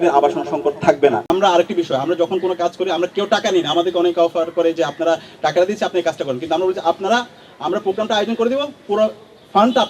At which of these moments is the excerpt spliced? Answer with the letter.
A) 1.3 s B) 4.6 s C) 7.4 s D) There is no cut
A